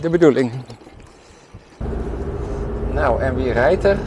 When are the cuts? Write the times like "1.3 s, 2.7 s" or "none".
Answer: 1.8 s